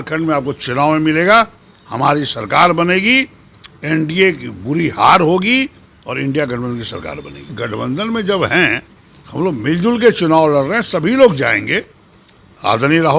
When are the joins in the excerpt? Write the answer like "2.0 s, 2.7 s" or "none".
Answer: 7.5 s

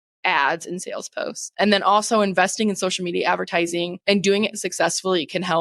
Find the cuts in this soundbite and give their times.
3.9 s

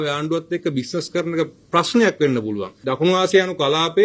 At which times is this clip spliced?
2.7 s

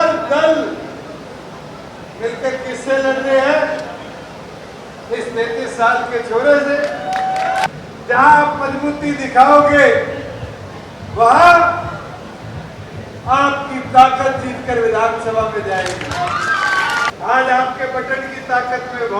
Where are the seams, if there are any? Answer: 7.7 s, 17.1 s

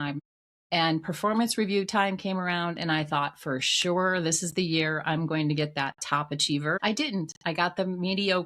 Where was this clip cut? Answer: 6.7 s

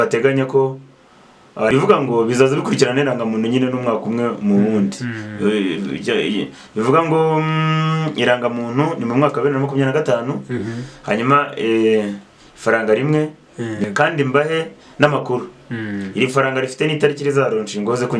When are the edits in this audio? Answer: 1.7 s, 13.8 s

